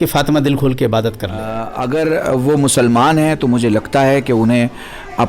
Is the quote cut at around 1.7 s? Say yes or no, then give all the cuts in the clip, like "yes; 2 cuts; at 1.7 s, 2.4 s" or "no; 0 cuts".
yes; 1 cut; at 1.7 s